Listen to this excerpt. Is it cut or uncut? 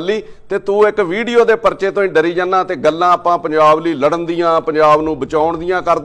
uncut